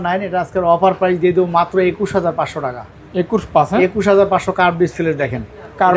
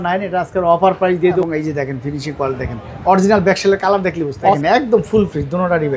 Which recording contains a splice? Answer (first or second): second